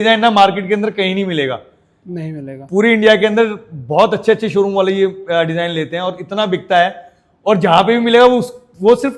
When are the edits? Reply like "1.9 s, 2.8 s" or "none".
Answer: none